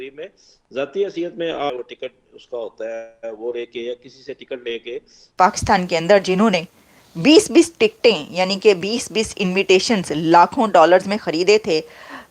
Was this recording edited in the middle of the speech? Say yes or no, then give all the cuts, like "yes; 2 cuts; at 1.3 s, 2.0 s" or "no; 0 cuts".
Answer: yes; 2 cuts; at 1.7 s, 5.2 s